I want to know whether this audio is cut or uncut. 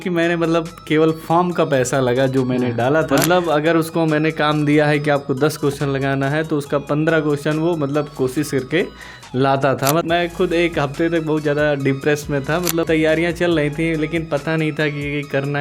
cut